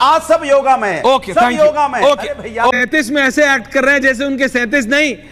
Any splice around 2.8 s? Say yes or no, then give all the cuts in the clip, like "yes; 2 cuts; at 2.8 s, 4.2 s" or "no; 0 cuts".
yes; 1 cut; at 2.8 s